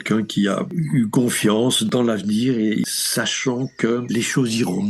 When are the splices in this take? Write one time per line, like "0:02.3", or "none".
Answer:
0:01.9
0:02.9
0:04.0